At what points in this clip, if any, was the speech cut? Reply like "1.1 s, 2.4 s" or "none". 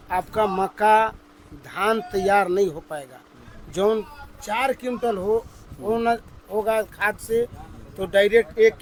none